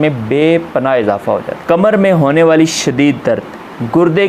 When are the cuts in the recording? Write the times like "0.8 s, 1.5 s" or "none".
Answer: 1.5 s